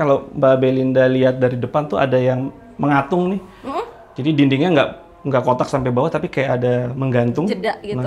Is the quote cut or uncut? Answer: uncut